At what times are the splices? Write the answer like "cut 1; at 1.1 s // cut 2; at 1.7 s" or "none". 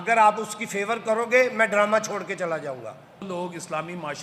cut 1; at 3.2 s